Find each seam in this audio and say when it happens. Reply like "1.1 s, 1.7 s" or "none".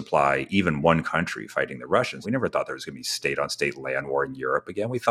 2.2 s